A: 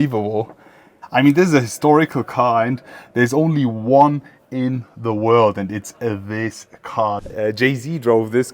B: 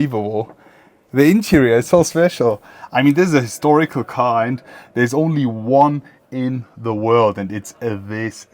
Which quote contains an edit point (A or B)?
A